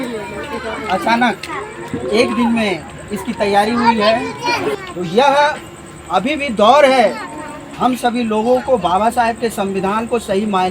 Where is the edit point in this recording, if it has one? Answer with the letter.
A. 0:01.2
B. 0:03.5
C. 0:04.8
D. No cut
C